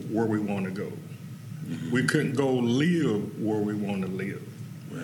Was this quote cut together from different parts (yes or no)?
no